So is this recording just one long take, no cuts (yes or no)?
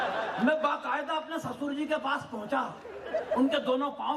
yes